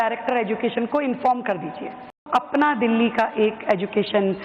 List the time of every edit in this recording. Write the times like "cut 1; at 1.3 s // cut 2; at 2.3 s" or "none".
cut 1; at 2.3 s